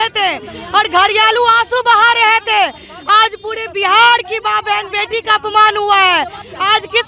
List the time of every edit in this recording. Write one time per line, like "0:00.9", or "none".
none